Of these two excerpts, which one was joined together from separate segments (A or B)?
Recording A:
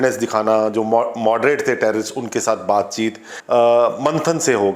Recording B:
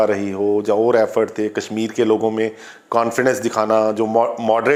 A